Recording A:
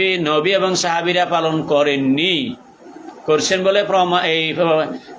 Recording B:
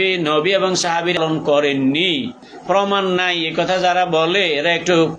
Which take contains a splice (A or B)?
B